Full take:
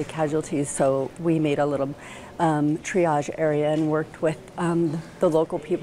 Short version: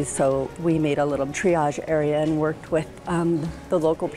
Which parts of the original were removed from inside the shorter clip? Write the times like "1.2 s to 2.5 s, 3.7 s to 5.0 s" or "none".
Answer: 1.9 s to 2.9 s